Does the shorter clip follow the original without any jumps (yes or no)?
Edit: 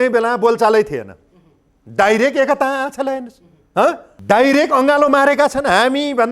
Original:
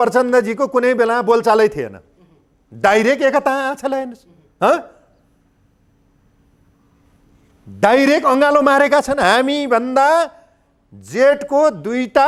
no